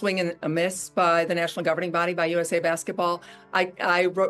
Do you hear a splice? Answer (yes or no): yes